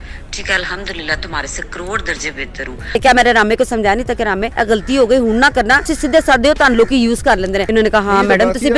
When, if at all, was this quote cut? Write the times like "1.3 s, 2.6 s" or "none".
3.0 s, 4.5 s, 5.9 s, 7.6 s